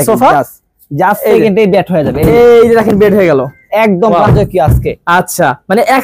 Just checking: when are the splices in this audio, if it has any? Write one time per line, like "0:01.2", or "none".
none